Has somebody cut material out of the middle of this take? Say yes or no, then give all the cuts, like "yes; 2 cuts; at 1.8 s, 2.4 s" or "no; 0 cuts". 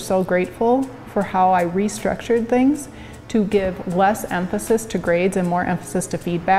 no; 0 cuts